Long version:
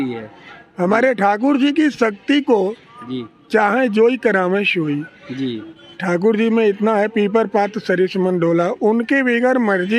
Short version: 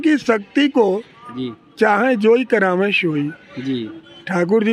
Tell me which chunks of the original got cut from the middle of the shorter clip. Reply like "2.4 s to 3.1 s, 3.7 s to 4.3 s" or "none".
none